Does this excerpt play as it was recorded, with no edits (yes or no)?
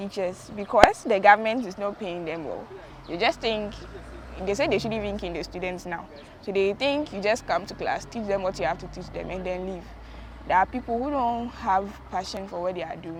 yes